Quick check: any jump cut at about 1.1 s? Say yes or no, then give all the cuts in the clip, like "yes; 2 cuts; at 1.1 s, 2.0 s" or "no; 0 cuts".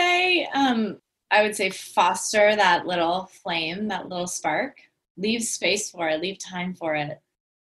yes; 1 cut; at 1.1 s